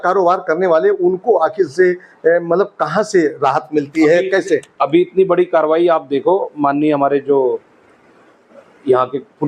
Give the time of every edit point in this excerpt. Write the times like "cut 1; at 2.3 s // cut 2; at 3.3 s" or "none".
none